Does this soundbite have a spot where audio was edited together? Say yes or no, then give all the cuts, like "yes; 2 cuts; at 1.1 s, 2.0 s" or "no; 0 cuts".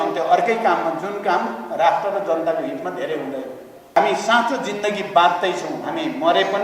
yes; 1 cut; at 4.0 s